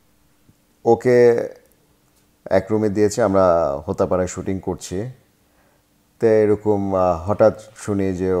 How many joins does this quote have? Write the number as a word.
zero